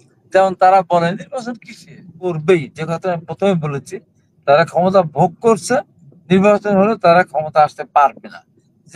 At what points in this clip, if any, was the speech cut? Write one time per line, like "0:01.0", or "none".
0:02.4